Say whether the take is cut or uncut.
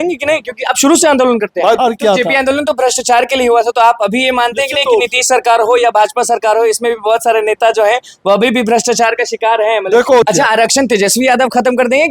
cut